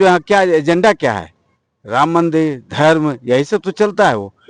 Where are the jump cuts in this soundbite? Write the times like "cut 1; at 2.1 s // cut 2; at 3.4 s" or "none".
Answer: none